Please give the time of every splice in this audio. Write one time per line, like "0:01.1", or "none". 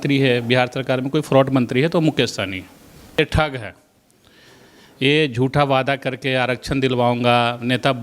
0:03.2

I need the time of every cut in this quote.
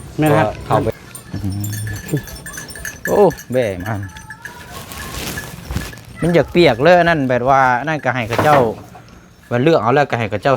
0:00.9

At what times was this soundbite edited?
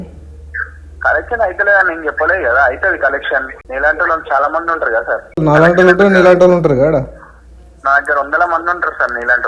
0:03.6
0:05.4

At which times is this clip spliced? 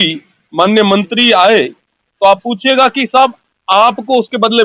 none

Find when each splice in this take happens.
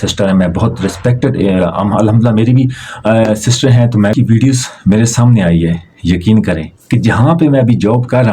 0:04.1

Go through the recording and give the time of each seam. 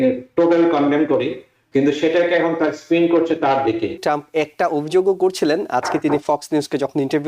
0:04.0

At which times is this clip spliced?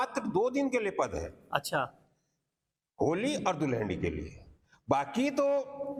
none

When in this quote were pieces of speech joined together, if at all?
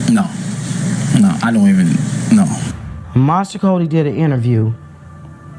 0:02.7

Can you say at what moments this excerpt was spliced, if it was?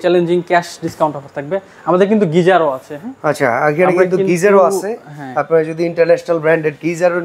none

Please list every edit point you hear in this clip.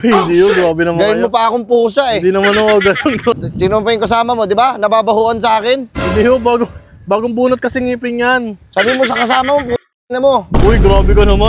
0:03.5

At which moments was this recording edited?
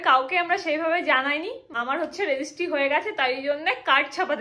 0:01.7

